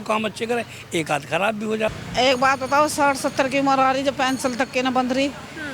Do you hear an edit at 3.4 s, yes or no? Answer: no